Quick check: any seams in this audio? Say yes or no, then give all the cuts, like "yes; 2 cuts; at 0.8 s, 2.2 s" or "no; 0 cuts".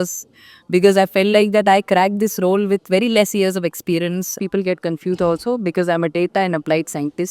yes; 1 cut; at 4.4 s